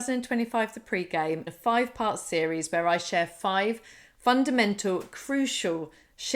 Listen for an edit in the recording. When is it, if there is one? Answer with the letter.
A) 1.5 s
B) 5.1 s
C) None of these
A